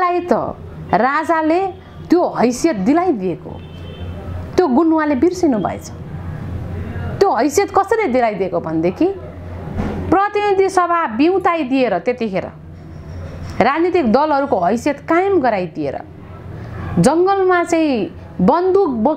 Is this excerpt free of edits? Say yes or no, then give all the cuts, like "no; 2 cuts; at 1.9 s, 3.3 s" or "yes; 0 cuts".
yes; 0 cuts